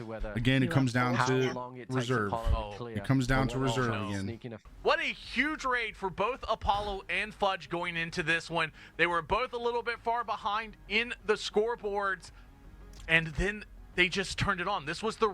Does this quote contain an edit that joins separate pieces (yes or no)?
yes